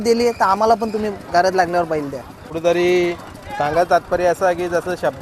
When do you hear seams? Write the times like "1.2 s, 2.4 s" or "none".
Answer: 2.5 s